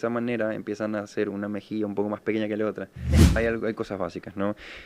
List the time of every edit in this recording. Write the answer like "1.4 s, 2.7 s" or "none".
3.3 s